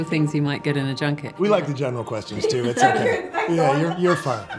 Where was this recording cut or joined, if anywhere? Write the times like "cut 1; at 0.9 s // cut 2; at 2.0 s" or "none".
cut 1; at 1.3 s // cut 2; at 3.6 s